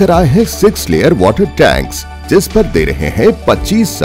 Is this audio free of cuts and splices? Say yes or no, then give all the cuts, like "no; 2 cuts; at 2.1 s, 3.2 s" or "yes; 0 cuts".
yes; 0 cuts